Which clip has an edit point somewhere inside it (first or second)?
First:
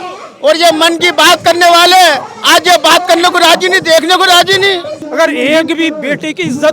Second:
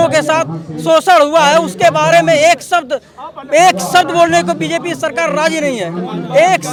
first